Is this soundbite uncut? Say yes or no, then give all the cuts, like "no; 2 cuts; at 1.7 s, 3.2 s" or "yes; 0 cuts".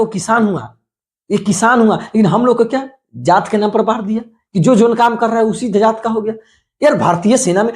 yes; 0 cuts